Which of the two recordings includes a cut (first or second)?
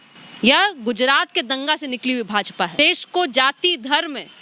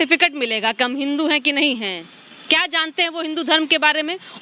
first